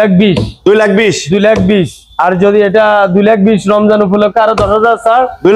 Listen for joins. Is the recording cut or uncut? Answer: uncut